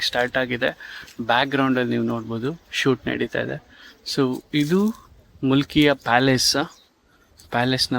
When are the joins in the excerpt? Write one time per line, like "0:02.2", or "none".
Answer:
none